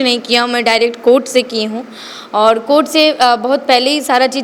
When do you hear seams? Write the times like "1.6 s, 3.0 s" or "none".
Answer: none